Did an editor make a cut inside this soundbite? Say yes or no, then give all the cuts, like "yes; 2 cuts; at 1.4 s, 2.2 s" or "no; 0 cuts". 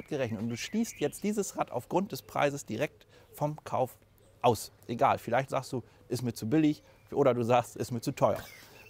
no; 0 cuts